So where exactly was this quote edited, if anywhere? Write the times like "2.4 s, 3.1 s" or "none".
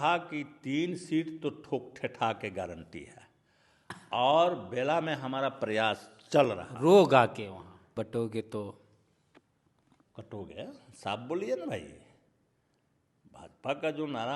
7.9 s